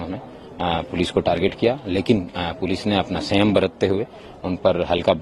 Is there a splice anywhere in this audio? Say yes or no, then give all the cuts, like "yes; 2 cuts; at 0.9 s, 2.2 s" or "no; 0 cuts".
no; 0 cuts